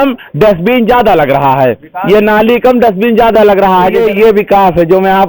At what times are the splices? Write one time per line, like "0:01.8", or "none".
0:03.9